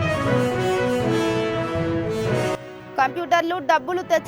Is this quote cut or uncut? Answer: uncut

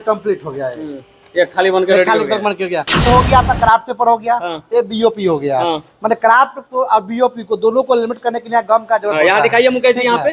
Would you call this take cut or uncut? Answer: cut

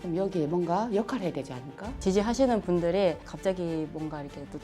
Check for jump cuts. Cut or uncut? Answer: cut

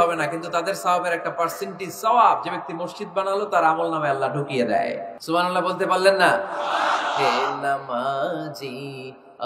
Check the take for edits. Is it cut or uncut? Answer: cut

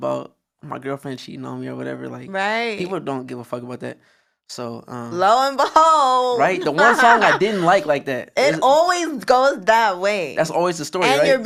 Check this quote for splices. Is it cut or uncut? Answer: uncut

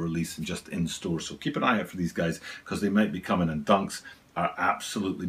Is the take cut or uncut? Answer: uncut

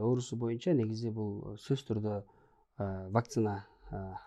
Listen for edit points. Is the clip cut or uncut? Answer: uncut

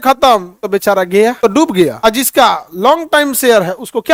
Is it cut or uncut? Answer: uncut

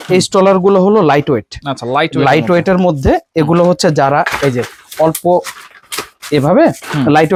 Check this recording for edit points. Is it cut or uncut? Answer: uncut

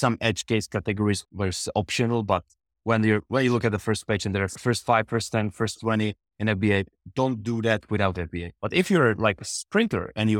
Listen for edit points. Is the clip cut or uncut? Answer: cut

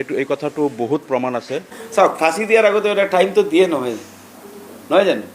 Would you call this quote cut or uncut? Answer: cut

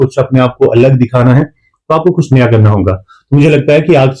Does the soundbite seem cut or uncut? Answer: uncut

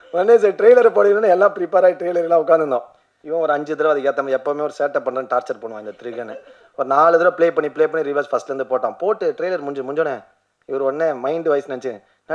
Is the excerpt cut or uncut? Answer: uncut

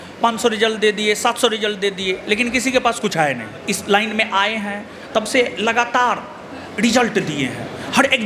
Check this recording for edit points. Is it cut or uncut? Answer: cut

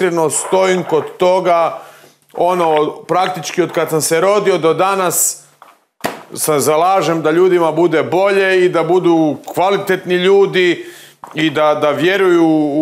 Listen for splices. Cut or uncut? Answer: uncut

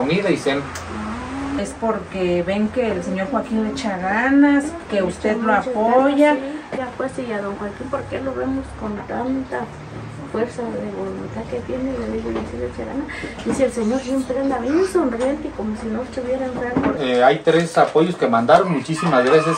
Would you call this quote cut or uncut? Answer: cut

